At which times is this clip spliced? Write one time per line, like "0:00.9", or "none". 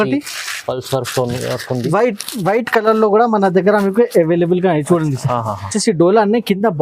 0:05.8